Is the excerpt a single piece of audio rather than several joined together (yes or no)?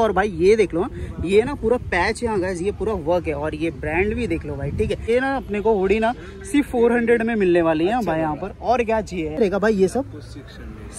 no